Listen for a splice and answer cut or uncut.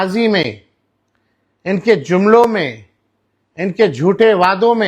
uncut